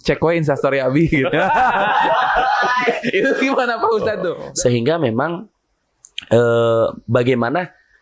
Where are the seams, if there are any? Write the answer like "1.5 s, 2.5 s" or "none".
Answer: 4.4 s